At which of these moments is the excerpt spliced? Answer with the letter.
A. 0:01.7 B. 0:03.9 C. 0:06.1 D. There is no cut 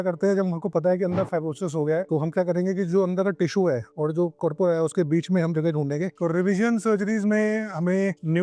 C